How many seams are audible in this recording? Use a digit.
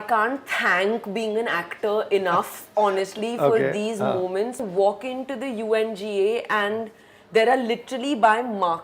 1